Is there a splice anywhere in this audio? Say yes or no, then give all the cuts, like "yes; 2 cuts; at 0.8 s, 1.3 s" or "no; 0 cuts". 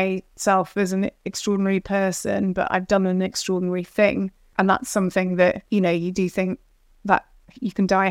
yes; 2 cuts; at 4.5 s, 5.6 s